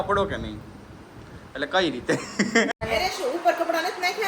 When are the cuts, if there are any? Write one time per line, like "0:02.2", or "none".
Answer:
0:02.7